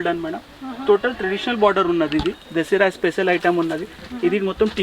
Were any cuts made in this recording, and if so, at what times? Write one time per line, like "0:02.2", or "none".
0:02.4